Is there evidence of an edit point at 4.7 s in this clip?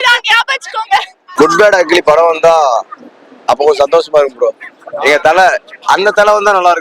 no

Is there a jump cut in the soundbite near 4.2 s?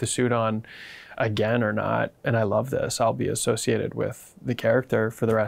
no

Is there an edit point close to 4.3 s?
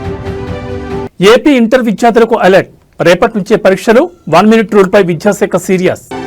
no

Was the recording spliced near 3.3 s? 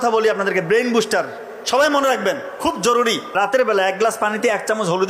yes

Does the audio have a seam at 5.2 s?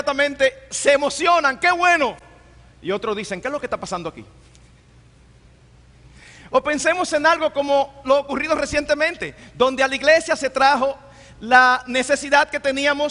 yes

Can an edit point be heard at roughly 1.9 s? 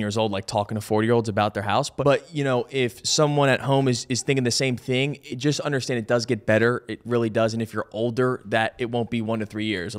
yes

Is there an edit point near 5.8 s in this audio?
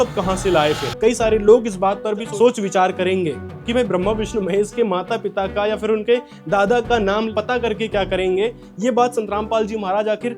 no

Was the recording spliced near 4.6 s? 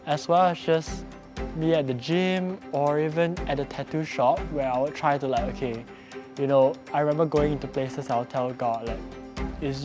no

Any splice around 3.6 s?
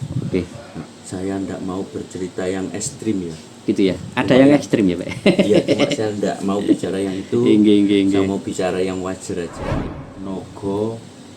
no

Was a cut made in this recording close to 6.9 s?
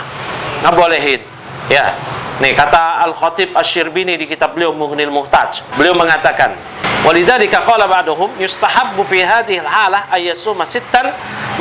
yes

